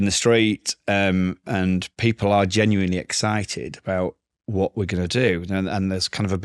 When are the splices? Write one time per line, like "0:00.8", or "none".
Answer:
none